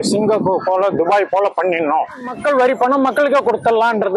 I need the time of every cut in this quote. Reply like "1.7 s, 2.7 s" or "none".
2.3 s

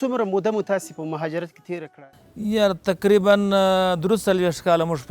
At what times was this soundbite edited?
1.9 s

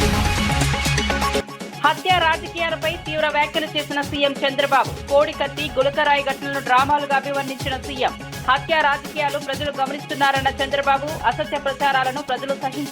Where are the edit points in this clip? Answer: 1.4 s

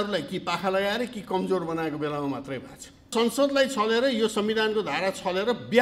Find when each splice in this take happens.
3.1 s

